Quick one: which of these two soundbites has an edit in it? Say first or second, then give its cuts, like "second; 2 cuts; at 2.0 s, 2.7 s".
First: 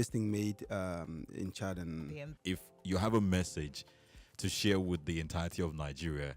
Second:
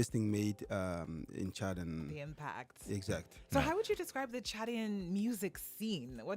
first; 1 cut; at 2.3 s